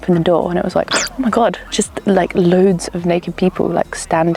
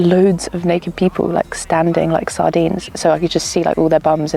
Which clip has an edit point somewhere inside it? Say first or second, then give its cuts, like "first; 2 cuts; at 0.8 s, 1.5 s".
second; 1 cut; at 2.9 s